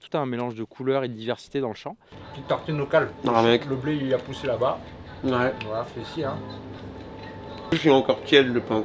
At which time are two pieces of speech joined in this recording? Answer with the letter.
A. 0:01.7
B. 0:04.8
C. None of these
A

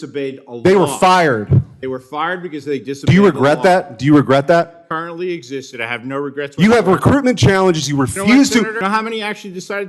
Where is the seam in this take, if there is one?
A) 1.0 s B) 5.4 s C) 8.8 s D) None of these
C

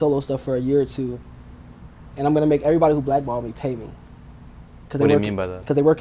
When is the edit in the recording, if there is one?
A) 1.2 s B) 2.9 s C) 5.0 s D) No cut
D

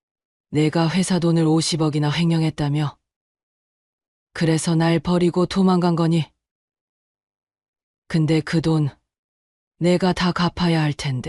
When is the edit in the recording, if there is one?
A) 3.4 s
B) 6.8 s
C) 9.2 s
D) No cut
D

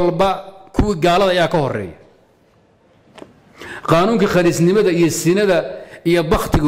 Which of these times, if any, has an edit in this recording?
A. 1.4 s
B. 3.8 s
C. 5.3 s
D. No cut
D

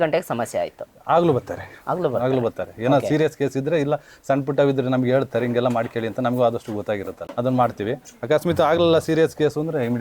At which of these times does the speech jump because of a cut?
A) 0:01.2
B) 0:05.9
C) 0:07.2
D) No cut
C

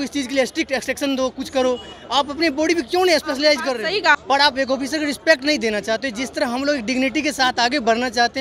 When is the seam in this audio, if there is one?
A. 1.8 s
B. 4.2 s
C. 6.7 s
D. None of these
B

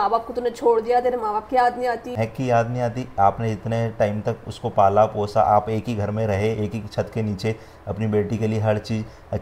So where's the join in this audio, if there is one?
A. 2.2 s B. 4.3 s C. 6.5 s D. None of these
A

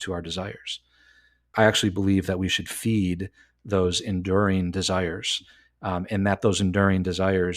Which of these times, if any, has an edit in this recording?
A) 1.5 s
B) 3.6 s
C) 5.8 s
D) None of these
A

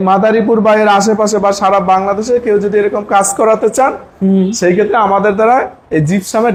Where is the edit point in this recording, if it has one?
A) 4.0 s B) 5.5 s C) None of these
C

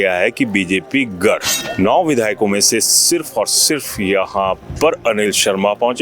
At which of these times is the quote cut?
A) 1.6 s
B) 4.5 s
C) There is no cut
A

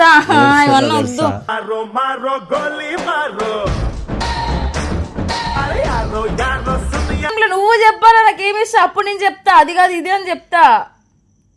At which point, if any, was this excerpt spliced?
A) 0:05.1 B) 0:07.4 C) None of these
B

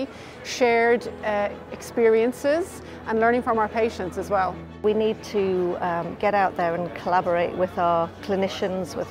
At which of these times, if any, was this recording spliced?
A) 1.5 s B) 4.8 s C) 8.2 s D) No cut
B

